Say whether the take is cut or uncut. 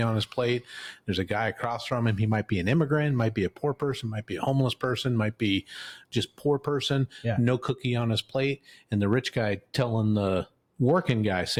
uncut